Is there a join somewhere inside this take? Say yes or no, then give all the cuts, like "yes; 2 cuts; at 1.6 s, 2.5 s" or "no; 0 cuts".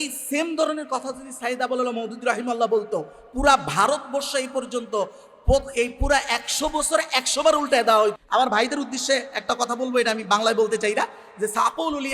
yes; 1 cut; at 8.2 s